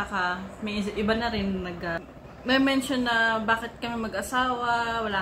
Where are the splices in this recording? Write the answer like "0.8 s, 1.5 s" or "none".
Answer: 2.0 s